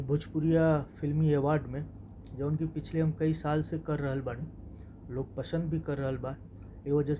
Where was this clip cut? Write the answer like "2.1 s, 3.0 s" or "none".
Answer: none